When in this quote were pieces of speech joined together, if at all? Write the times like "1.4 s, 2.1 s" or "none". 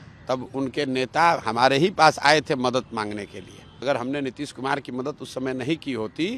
3.8 s